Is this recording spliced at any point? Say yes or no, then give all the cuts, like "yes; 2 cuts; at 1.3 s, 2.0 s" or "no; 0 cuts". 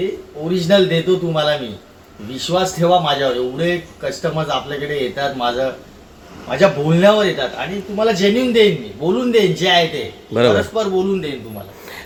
no; 0 cuts